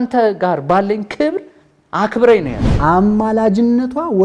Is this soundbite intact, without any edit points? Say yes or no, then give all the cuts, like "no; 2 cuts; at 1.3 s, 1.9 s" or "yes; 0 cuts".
no; 1 cut; at 2.7 s